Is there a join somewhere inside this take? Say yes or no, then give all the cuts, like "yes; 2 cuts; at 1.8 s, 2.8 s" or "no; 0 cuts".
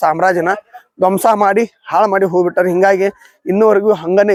no; 0 cuts